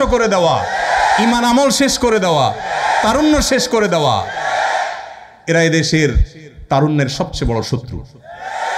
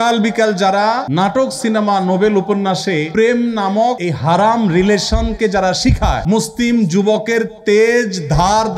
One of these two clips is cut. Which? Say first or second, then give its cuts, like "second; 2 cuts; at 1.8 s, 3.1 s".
second; 4 cuts; at 1.1 s, 3.1 s, 4.1 s, 6.2 s